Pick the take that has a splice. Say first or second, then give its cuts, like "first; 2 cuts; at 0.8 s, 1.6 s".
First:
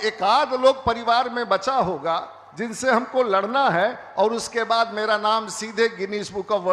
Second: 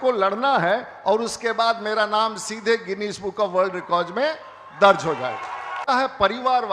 second; 1 cut; at 5.8 s